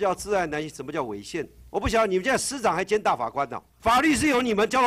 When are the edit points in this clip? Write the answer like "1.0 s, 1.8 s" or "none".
1.6 s, 3.6 s